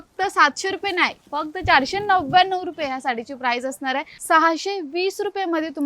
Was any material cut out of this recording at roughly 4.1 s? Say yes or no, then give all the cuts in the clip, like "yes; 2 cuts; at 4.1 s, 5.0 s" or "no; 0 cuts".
yes; 1 cut; at 4.1 s